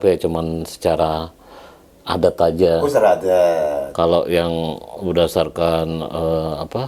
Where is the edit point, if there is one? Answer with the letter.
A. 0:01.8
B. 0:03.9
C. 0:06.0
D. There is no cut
B